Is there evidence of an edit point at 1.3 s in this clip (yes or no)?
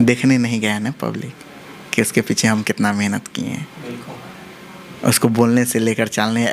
no